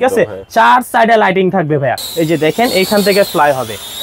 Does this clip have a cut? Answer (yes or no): yes